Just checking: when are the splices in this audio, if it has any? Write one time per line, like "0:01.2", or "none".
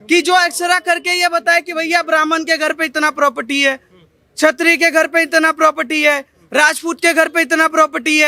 none